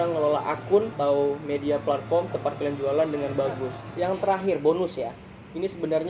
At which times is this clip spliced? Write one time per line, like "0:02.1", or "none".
0:00.9
0:03.8